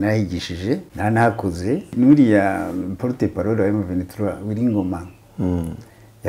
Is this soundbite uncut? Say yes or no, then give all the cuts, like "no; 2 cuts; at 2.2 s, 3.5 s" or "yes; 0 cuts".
no; 2 cuts; at 0.9 s, 1.9 s